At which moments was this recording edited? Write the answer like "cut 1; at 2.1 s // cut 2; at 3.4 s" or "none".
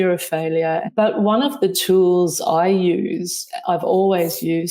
cut 1; at 0.9 s // cut 2; at 1.8 s